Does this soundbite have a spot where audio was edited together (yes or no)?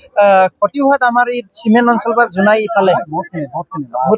no